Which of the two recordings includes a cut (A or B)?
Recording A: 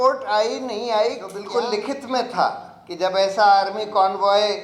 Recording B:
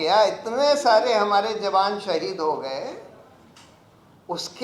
A